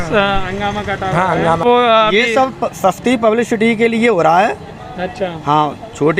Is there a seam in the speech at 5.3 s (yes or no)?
no